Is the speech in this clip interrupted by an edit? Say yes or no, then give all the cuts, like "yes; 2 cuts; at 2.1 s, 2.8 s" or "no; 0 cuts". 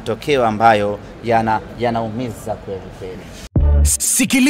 yes; 1 cut; at 3.3 s